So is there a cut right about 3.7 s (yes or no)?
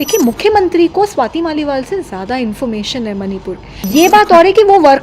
yes